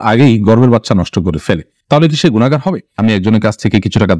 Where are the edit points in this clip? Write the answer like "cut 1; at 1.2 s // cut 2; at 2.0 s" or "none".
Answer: cut 1; at 3.0 s